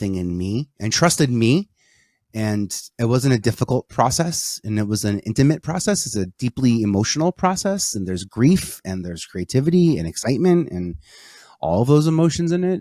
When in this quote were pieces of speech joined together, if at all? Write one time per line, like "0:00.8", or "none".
none